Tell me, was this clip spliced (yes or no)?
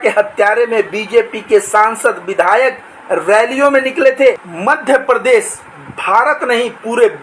yes